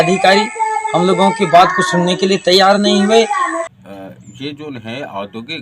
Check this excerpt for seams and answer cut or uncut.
cut